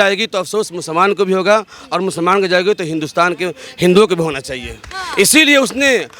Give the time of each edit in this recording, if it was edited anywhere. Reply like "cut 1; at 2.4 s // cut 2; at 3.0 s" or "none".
none